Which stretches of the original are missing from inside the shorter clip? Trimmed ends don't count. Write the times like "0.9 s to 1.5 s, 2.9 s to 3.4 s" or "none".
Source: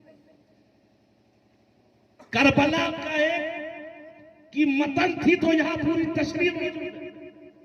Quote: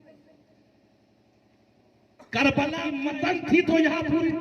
3.0 s to 4.7 s